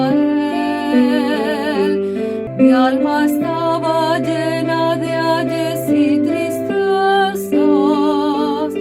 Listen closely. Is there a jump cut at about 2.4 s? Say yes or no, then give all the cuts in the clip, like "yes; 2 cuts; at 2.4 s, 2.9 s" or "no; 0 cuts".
yes; 1 cut; at 2.4 s